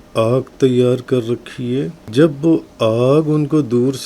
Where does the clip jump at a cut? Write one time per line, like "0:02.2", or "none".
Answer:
0:02.0